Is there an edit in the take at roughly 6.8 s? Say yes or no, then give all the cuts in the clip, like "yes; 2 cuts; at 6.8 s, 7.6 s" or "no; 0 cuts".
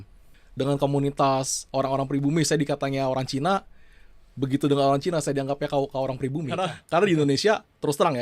yes; 1 cut; at 6.8 s